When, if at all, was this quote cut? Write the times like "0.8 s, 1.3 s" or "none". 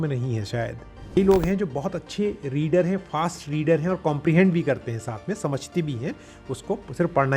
1.2 s